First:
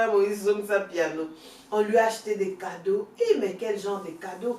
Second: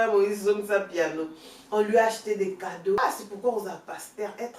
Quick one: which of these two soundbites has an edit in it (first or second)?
second